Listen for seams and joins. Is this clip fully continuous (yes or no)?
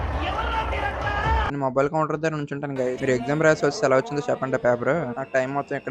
yes